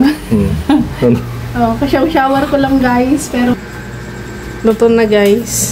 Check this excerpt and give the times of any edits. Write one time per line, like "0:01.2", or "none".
0:03.5